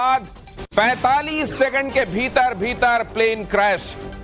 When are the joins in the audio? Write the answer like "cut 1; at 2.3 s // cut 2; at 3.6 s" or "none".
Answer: cut 1; at 2.1 s